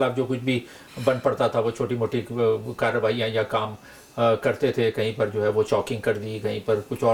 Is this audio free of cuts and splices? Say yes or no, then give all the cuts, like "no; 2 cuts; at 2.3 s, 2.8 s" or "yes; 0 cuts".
yes; 0 cuts